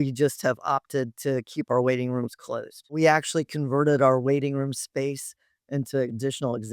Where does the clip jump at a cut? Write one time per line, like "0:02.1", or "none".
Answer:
0:02.9